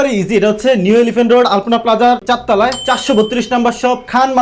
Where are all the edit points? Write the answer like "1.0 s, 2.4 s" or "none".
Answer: none